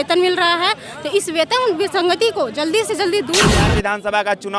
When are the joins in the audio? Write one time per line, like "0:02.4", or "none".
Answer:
0:03.5